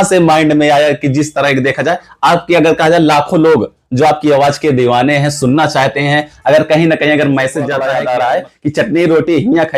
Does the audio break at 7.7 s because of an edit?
yes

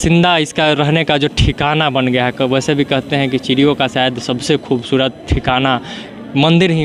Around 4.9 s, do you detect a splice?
no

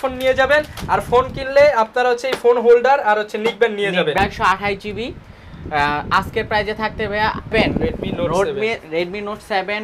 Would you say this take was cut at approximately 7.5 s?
yes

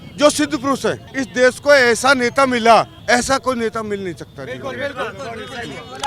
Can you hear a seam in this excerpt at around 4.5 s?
no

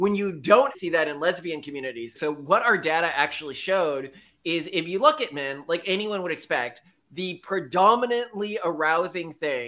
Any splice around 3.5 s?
no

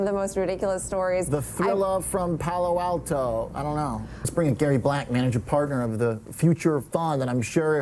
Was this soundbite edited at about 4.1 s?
yes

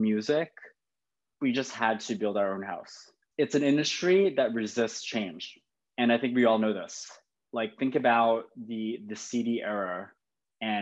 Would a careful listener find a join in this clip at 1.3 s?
no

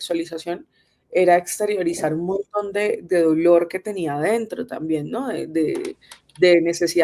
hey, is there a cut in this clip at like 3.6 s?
no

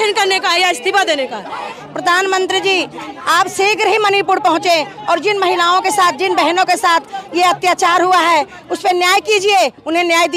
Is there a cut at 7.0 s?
no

